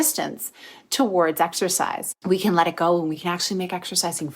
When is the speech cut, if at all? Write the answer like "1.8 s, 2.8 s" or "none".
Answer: 2.1 s, 3.2 s